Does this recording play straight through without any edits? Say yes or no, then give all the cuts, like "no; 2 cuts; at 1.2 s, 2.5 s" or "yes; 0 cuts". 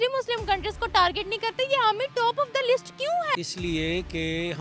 yes; 0 cuts